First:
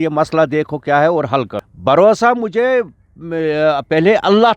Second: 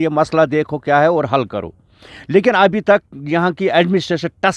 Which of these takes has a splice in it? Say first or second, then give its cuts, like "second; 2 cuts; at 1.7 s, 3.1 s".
first; 1 cut; at 1.6 s